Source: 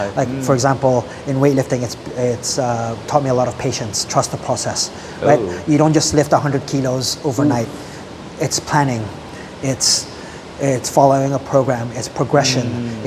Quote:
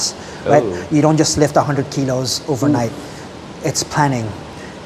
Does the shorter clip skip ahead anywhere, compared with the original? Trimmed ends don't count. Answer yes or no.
no